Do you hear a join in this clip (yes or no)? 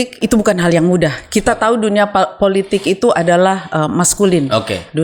no